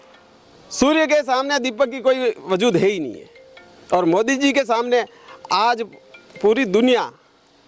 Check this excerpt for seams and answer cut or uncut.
uncut